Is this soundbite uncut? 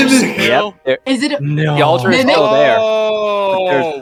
yes; 0 cuts

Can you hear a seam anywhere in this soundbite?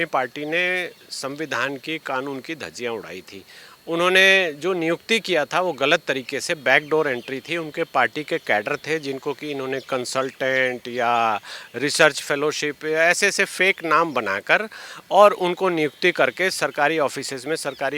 no; 0 cuts

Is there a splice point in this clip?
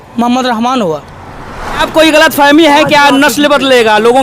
yes; 1 cut; at 1.8 s

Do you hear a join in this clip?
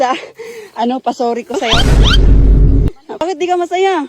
yes; 2 cuts; at 1.7 s, 3.1 s

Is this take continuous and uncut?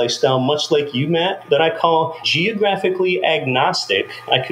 no; 2 cuts; at 1.4 s, 2.2 s

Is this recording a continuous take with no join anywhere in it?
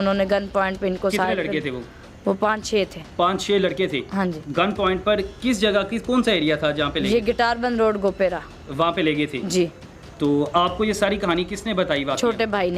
yes; 0 cuts

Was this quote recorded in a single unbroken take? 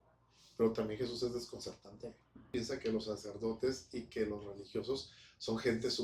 no; 1 cut; at 2.5 s

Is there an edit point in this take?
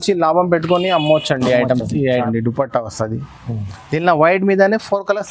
yes; 1 cut; at 2.2 s

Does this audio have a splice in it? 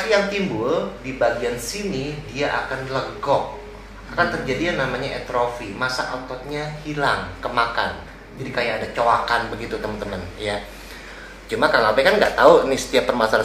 no; 0 cuts

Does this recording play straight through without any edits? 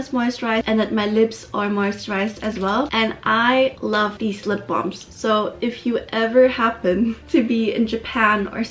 yes; 0 cuts

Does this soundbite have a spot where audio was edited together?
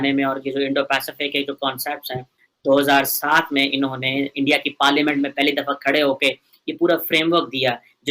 no; 0 cuts

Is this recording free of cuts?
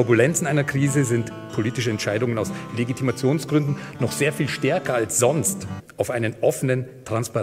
yes; 0 cuts

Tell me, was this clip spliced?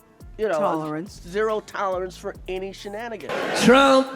yes; 1 cut; at 3.2 s

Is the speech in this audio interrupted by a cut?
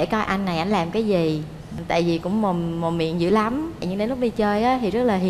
no; 0 cuts

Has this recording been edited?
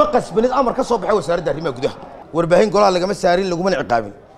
yes; 1 cut; at 2.1 s

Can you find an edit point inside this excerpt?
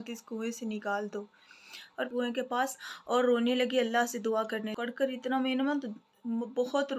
yes; 2 cuts; at 2.0 s, 4.7 s

